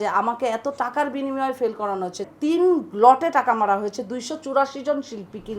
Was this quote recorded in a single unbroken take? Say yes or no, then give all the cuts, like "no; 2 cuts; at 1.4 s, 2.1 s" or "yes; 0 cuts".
no; 1 cut; at 2.2 s